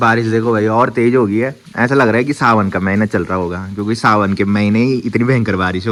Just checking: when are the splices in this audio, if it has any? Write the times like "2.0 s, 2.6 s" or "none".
none

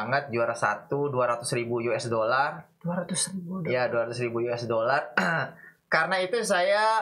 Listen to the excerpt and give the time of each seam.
none

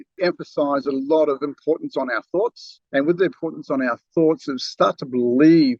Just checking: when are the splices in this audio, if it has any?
none

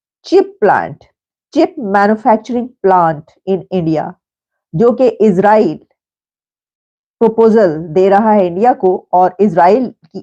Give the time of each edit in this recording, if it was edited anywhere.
none

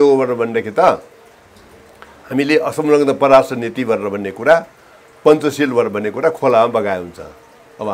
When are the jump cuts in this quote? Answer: none

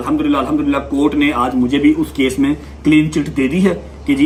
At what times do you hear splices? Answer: none

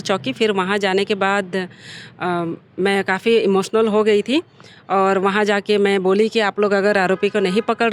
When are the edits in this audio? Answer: none

